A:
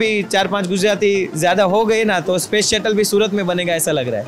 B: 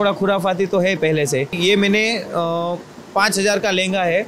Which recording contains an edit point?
B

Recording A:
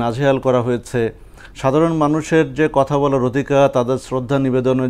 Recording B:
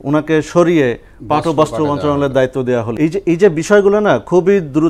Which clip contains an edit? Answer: B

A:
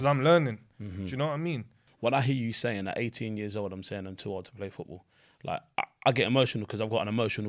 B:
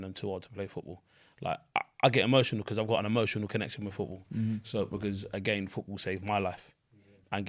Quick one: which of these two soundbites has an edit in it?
A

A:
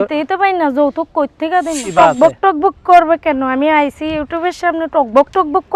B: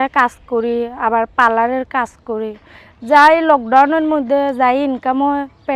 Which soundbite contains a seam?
A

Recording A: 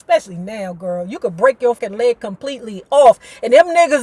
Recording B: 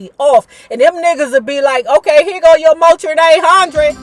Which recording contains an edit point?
A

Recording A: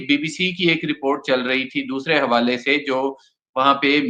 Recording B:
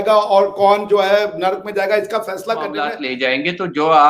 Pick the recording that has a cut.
B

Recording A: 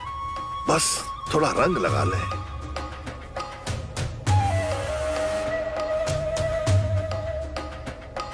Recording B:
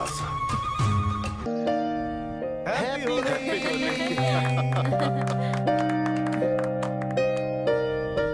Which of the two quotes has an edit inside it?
B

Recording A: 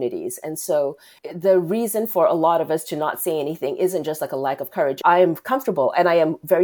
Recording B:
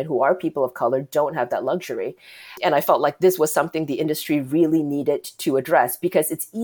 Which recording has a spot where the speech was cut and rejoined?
A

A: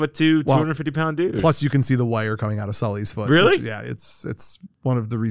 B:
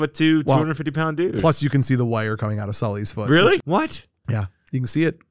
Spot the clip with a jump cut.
B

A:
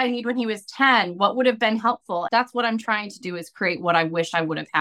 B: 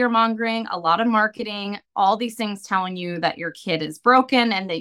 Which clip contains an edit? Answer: A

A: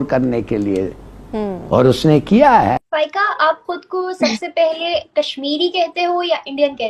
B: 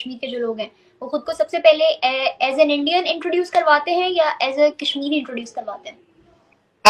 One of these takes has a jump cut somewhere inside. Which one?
A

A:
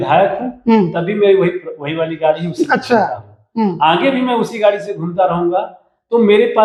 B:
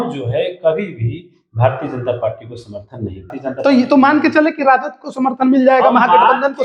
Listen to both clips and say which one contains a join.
B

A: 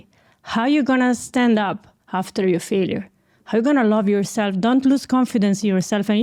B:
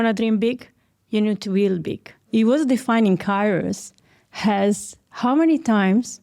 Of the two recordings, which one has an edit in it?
B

